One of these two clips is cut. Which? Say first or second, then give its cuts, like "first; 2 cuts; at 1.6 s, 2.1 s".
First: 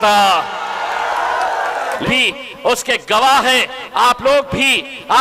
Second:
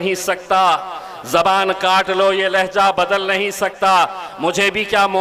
first; 1 cut; at 2.0 s